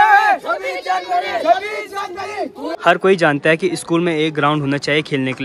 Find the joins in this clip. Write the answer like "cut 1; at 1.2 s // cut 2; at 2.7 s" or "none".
cut 1; at 2.7 s